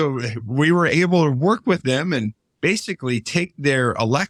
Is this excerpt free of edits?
yes; 0 cuts

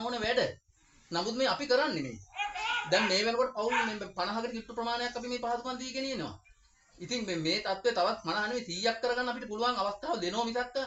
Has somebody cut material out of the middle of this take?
no; 0 cuts

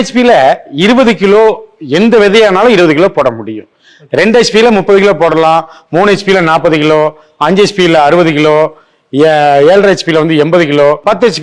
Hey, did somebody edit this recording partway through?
no; 0 cuts

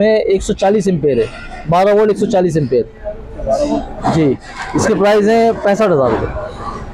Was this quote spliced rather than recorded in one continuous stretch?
no; 0 cuts

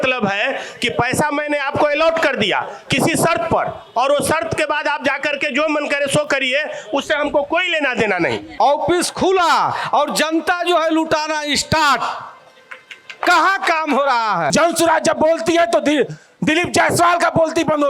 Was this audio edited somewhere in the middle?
yes; 2 cuts; at 8.5 s, 14.5 s

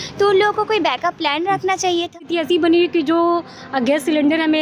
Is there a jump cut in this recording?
yes; 1 cut; at 2.2 s

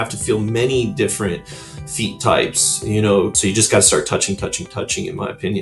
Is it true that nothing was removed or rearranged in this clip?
no; 1 cut; at 3.3 s

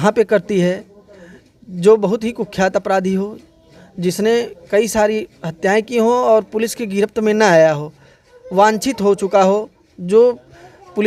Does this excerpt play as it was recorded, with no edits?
yes; 0 cuts

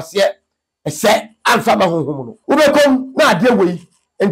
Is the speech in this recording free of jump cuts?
no; 1 cut; at 2.3 s

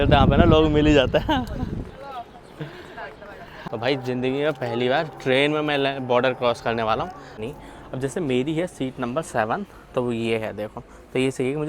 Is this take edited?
yes; 2 cuts; at 3.6 s, 7.4 s

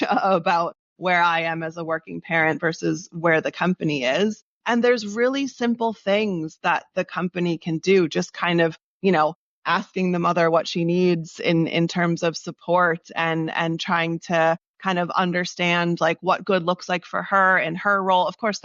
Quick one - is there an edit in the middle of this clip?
no; 0 cuts

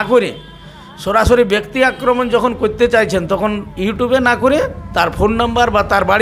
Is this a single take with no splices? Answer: yes; 0 cuts

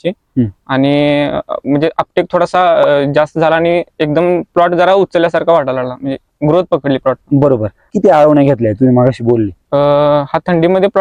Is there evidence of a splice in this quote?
no; 0 cuts

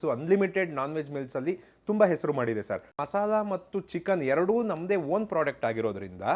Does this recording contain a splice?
yes; 1 cut; at 3.0 s

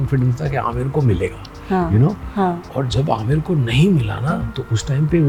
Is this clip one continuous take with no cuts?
yes; 0 cuts

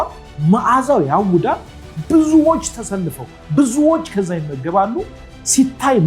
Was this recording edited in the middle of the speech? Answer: no; 0 cuts

